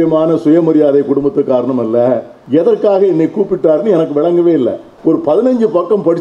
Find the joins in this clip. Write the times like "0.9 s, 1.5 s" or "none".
2.3 s, 4.9 s